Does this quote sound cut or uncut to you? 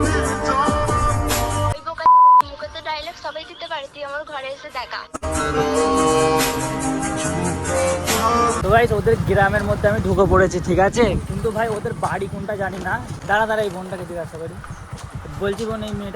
cut